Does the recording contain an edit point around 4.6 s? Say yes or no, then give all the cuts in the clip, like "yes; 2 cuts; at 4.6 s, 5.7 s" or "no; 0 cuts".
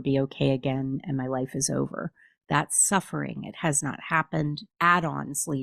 yes; 1 cut; at 4.6 s